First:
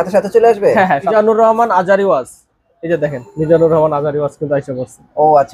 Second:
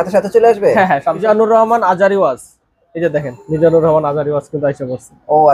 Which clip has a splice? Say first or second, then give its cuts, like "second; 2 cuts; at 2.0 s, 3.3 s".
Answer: first; 1 cut; at 1.1 s